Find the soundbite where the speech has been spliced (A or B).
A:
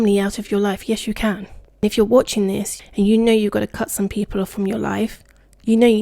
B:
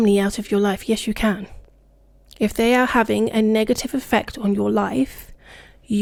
A